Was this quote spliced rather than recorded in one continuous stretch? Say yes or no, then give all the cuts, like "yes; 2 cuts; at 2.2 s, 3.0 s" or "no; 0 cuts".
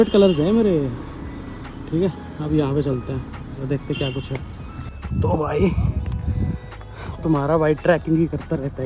no; 0 cuts